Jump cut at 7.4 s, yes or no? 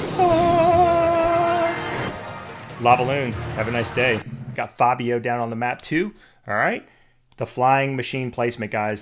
no